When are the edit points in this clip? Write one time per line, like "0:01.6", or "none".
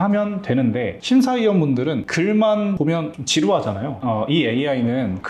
0:00.9
0:02.1
0:03.0
0:04.0